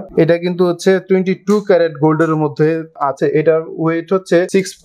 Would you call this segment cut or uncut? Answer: cut